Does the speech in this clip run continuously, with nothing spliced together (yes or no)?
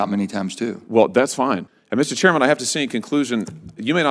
no